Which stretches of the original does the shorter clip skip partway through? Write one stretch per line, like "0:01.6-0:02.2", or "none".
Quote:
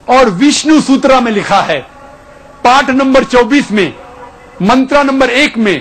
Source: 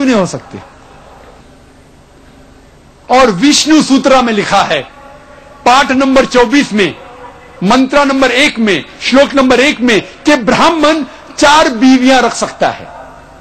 none